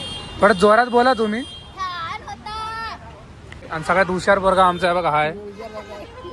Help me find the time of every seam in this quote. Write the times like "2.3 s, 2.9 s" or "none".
3.7 s